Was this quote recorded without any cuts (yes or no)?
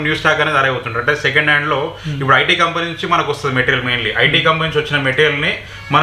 yes